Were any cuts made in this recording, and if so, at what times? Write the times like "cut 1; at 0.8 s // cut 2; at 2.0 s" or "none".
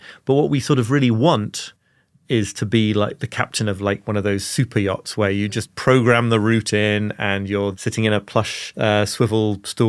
cut 1; at 7.7 s // cut 2; at 8.7 s